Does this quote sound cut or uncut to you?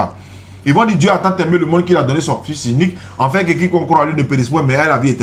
uncut